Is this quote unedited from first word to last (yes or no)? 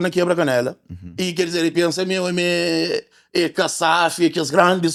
yes